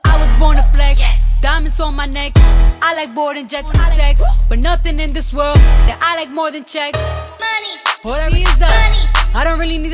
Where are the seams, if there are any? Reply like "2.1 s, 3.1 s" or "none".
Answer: 3.8 s, 8.3 s